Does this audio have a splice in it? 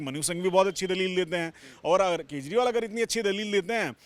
no; 0 cuts

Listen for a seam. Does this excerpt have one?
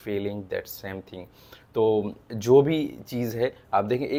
no; 0 cuts

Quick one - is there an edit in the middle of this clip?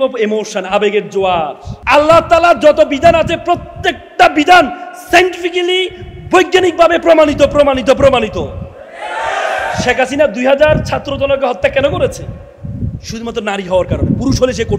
yes; 1 cut; at 1.7 s

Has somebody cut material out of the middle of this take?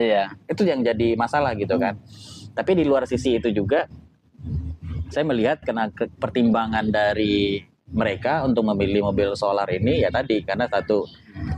no; 0 cuts

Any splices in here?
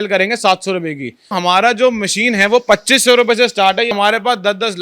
yes; 2 cuts; at 1.4 s, 3.9 s

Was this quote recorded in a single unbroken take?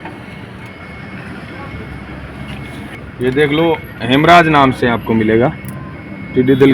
no; 1 cut; at 2.9 s

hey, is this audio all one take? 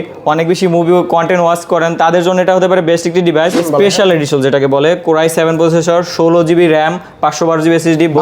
no; 1 cut; at 3.6 s

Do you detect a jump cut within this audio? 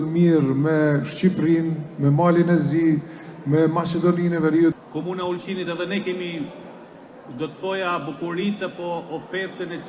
yes; 1 cut; at 4.8 s

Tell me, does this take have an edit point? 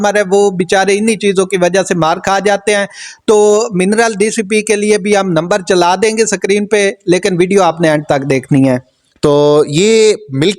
yes; 1 cut; at 9.0 s

